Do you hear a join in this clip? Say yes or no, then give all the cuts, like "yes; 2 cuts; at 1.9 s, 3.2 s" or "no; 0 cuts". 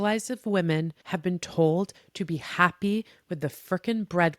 yes; 1 cut; at 1.0 s